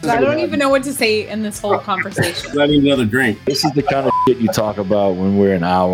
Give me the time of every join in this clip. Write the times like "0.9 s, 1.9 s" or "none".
2.5 s, 3.5 s